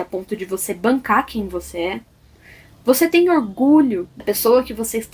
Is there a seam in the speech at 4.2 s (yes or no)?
yes